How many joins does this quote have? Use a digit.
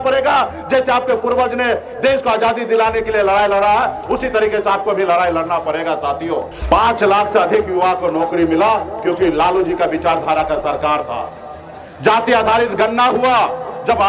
1